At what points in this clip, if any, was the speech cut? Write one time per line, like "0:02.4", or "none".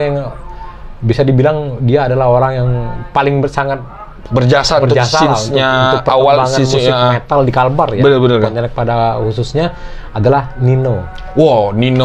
none